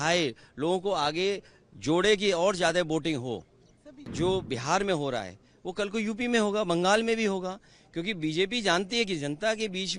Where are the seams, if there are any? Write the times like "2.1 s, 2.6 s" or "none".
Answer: 4.1 s